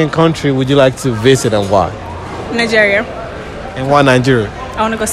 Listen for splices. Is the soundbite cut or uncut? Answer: cut